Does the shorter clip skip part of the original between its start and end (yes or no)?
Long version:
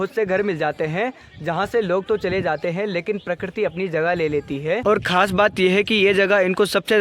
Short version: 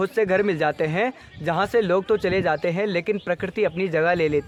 no